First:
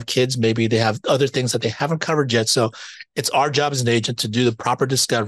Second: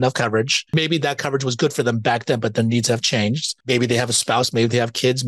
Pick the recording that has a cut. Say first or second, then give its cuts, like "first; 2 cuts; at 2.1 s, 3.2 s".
second; 2 cuts; at 0.7 s, 3.5 s